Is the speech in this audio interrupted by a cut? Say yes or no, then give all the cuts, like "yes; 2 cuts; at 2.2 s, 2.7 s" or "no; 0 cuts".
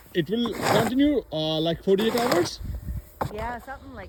no; 0 cuts